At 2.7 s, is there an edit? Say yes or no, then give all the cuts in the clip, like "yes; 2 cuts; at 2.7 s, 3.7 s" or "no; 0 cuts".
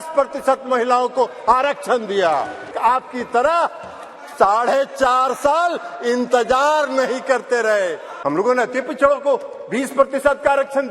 yes; 2 cuts; at 2.7 s, 8.1 s